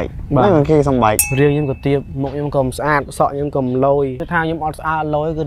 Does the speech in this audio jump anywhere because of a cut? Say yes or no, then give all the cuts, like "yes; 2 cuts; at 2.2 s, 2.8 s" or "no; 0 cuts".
yes; 2 cuts; at 1.2 s, 4.2 s